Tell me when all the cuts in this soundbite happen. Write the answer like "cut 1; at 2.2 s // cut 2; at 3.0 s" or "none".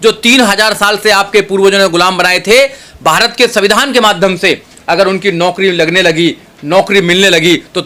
none